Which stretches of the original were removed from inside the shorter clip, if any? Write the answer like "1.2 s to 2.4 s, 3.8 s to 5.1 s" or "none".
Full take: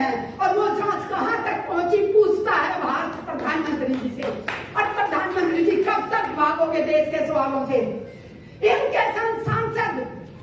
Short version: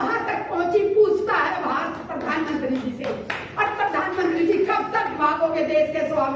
none